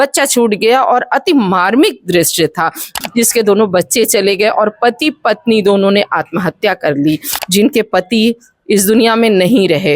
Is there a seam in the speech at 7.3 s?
yes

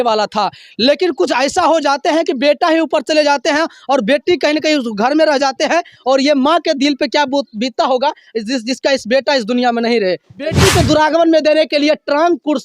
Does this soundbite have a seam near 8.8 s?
no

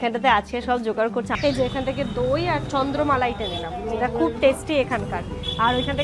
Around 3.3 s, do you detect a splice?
no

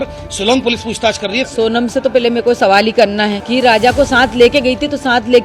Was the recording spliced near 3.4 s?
yes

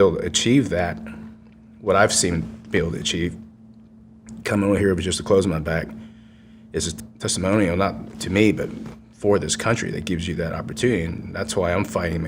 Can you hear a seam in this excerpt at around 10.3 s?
no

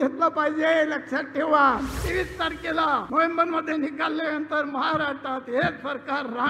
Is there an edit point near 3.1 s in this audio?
yes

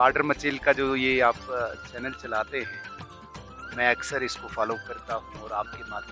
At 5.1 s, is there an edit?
no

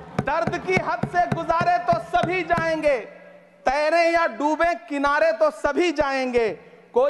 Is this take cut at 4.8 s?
no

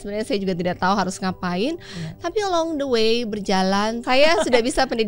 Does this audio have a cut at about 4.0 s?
yes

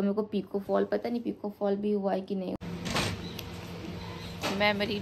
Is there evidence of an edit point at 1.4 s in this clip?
no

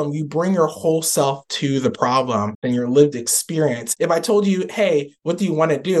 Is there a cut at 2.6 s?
yes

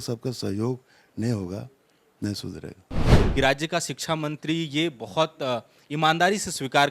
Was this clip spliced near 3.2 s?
yes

